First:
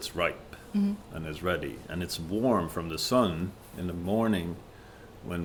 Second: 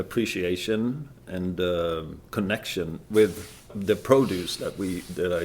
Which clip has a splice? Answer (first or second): second